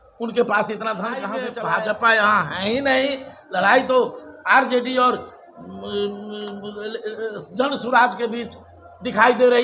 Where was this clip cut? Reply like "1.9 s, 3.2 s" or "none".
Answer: 1.4 s